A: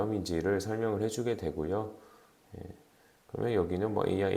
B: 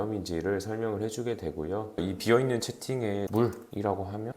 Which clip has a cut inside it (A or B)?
B